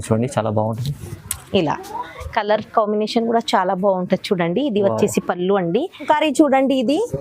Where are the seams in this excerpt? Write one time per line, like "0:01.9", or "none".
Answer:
0:06.0